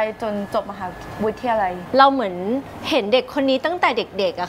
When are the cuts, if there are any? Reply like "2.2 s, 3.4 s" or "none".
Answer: 1.8 s